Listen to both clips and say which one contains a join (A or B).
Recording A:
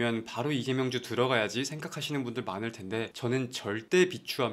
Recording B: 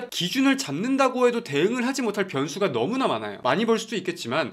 B